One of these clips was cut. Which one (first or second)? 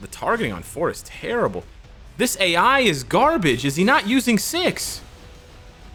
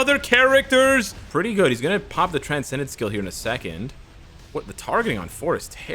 second